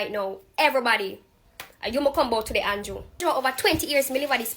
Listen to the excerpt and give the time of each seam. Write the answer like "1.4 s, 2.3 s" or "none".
3.2 s